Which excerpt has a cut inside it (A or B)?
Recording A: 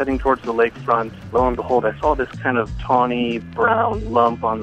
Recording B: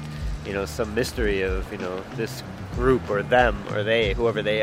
A